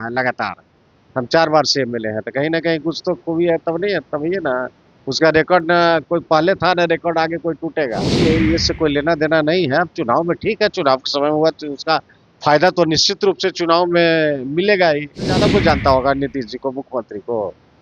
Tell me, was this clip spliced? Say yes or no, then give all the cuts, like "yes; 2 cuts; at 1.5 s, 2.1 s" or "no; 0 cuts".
yes; 2 cuts; at 8.1 s, 15.4 s